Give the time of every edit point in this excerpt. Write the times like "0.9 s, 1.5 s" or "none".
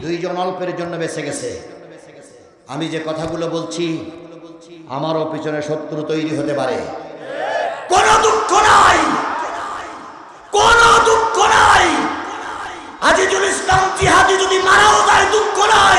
none